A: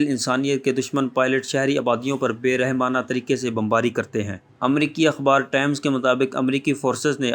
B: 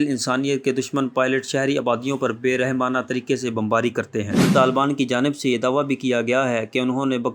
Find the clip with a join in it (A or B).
B